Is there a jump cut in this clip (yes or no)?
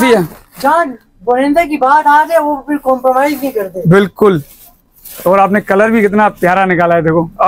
no